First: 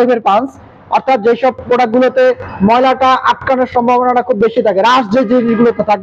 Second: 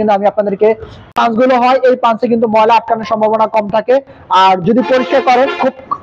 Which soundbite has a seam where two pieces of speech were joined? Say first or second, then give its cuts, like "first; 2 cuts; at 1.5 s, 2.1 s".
second; 1 cut; at 1.1 s